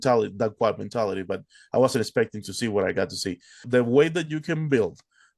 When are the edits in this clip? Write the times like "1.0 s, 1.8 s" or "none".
3.6 s